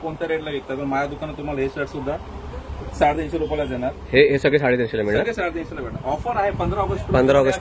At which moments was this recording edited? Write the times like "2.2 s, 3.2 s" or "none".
none